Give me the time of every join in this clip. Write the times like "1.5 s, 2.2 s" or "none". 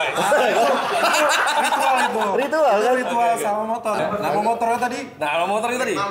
4.0 s